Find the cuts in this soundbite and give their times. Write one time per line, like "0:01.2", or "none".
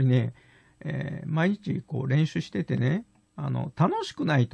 none